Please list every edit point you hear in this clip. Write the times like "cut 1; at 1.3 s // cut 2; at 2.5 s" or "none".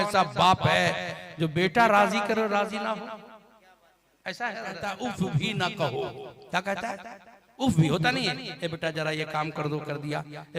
cut 1; at 4.9 s